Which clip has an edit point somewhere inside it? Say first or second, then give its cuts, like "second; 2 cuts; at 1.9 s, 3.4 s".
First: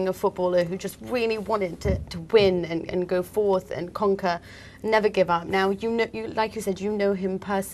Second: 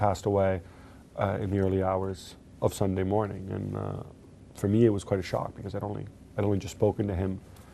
first; 1 cut; at 6.2 s